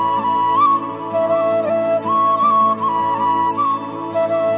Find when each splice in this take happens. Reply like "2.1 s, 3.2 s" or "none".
none